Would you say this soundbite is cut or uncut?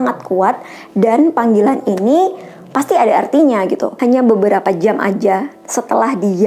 cut